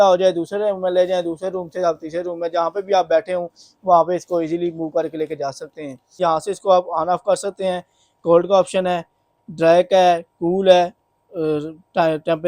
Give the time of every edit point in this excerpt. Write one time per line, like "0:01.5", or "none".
0:06.2